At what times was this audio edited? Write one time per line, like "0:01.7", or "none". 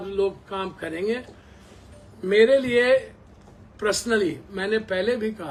none